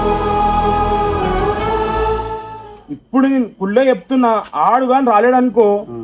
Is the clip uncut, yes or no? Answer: no